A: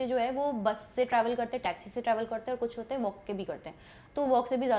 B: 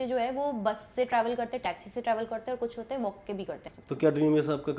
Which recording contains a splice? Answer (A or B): B